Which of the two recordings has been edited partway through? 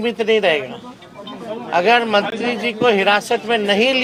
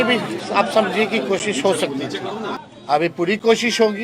second; 1 cut; at 2.7 s

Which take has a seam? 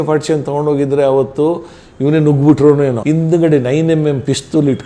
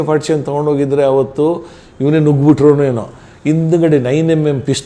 first; 1 cut; at 3.0 s

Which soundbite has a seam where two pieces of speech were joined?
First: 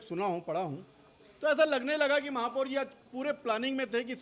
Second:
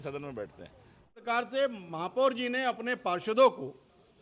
second; 1 cut; at 1.2 s

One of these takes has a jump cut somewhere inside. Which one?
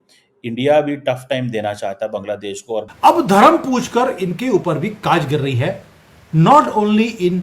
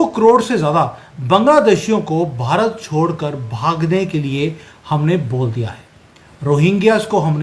first; 1 cut; at 2.9 s

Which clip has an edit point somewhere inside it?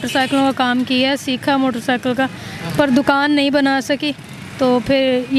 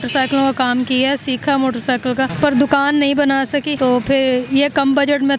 second; 2 cuts; at 2.3 s, 3.7 s

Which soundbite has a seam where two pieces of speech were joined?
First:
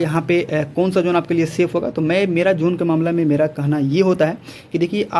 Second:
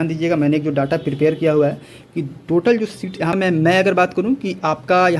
second; 1 cut; at 3.4 s

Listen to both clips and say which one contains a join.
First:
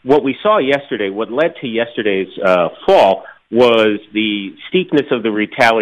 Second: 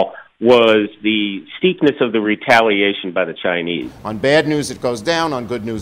second; 1 cut; at 3.9 s

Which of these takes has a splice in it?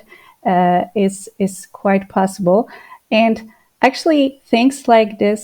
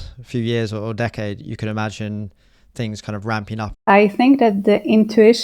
second; 1 cut; at 3.8 s

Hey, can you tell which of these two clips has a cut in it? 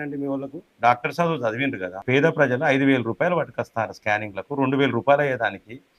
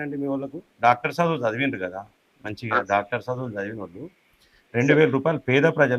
first; 1 cut; at 2.0 s

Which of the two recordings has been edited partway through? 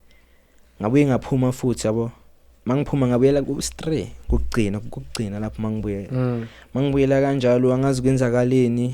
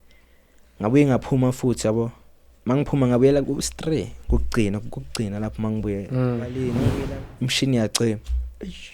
second; 1 cut; at 6.7 s

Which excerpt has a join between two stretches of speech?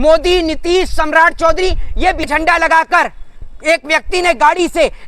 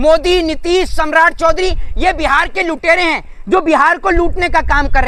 first; 1 cut; at 2.3 s

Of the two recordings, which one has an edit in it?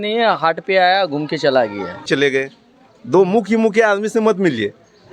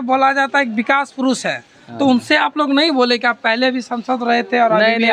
first; 1 cut; at 2.1 s

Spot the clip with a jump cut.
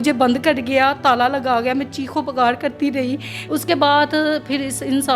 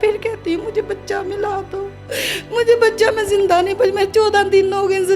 first; 1 cut; at 3.3 s

